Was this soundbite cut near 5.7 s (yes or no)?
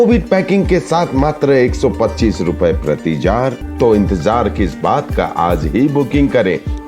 no